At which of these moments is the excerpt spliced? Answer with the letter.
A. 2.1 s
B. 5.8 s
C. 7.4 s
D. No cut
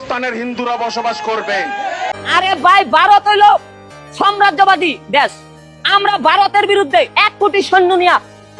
A